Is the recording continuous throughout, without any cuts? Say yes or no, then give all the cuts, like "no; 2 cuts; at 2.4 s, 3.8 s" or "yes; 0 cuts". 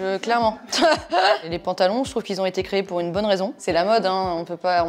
no; 2 cuts; at 1.5 s, 3.6 s